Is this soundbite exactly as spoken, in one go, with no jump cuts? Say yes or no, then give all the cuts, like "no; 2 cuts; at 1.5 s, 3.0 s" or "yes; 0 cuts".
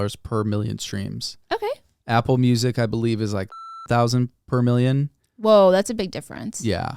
yes; 0 cuts